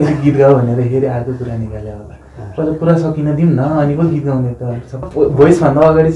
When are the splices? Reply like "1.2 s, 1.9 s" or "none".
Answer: 5.0 s